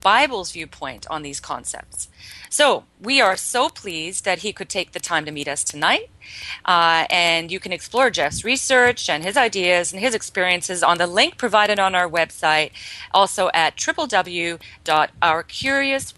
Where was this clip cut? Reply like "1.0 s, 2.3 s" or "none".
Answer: 1.6 s

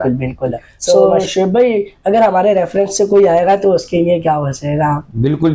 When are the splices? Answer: 1.1 s

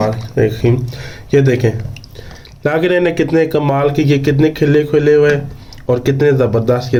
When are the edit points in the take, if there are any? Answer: none

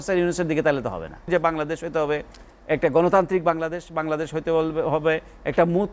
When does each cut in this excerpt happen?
1.3 s

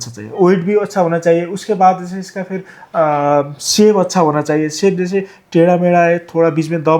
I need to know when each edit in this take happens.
none

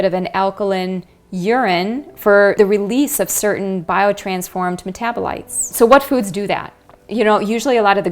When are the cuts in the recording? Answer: 2.6 s, 5.7 s

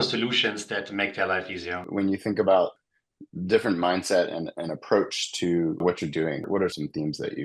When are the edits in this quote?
1.8 s, 2.8 s, 6.6 s

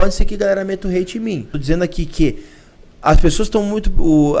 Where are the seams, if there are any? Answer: 1.5 s

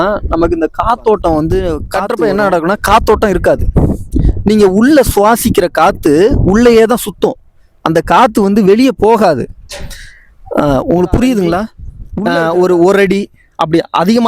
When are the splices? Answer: 1.8 s, 12.1 s

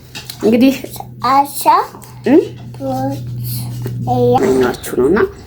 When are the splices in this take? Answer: 4.4 s

